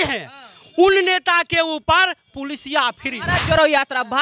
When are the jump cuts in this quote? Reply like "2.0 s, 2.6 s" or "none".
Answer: 3.3 s